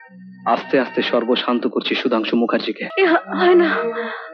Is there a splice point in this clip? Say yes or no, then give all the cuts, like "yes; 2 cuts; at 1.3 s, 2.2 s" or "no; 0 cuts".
yes; 1 cut; at 2.8 s